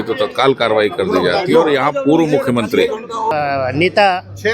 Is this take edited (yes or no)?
yes